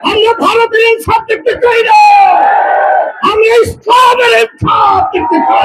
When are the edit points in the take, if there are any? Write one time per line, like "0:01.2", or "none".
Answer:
none